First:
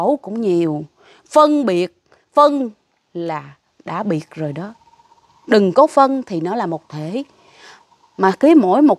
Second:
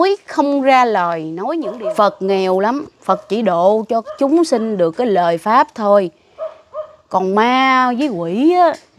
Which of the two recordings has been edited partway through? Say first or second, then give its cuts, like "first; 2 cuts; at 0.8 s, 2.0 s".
second; 1 cut; at 1.7 s